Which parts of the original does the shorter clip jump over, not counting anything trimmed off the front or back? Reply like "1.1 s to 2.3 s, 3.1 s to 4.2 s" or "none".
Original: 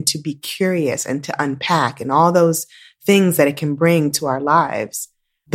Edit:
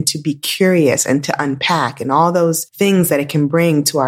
2.6 s to 2.9 s